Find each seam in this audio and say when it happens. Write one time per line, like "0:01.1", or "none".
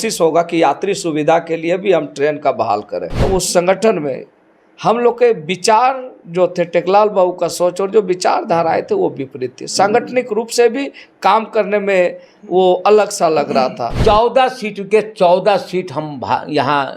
0:03.2
0:13.8